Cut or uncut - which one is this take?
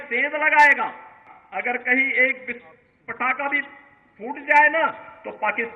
cut